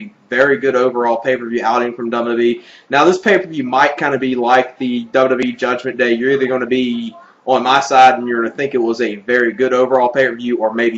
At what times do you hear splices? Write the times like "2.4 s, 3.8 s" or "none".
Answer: none